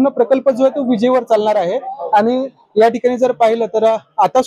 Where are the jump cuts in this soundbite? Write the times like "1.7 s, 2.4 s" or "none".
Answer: none